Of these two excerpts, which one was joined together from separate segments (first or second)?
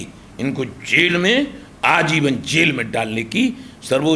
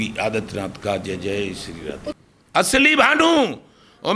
second